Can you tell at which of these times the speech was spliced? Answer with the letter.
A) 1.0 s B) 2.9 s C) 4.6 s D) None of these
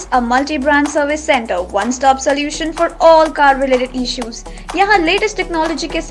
D